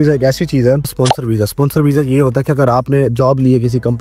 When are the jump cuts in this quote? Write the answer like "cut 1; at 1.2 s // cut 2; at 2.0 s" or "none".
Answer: cut 1; at 0.9 s